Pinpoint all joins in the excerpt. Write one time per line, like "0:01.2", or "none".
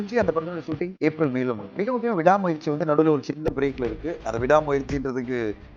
0:00.9
0:01.7